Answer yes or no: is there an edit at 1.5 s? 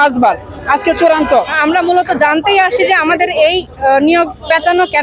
yes